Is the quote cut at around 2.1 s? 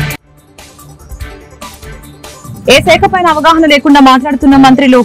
yes; 1 cut; at 2.1 s

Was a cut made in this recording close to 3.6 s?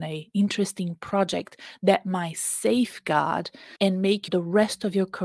yes; 2 cuts; at 3.6 s, 4.3 s

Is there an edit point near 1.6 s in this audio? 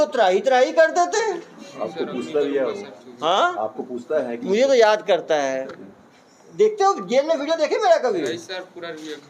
no; 0 cuts

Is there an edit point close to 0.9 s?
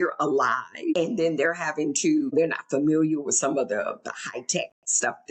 yes; 2 cuts; at 0.9 s, 2.3 s

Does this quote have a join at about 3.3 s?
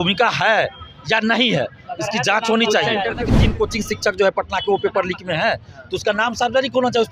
yes; 1 cut; at 3.3 s

